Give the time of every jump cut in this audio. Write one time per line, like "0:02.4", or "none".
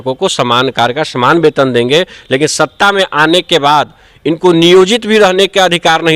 none